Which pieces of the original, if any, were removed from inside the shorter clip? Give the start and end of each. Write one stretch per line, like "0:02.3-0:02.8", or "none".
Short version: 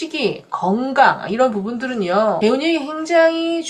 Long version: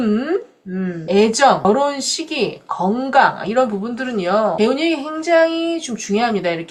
none

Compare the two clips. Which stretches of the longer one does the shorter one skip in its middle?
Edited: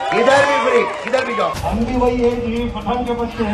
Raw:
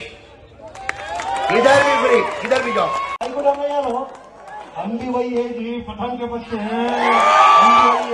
0:02.9-0:04.7

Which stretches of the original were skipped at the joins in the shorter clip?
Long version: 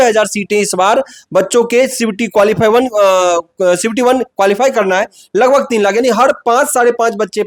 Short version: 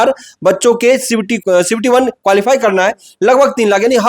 0:02.2-0:03.5

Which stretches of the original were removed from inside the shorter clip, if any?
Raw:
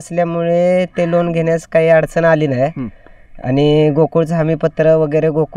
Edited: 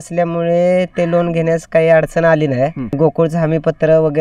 0:03.0-0:03.9

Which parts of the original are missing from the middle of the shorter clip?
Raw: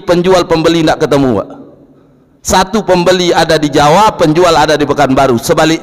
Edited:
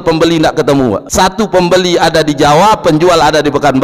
0:01.5-0:02.4

